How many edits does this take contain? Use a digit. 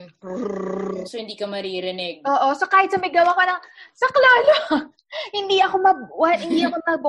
0